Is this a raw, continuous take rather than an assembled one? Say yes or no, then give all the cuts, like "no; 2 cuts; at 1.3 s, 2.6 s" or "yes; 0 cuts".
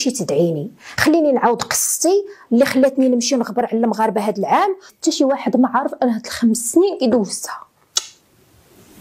no; 1 cut; at 4.9 s